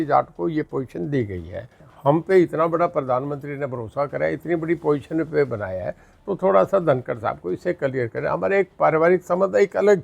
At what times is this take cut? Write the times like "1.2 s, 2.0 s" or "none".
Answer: 1.8 s